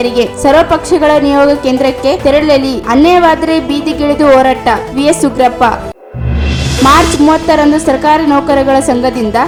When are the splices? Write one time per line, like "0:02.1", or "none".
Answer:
none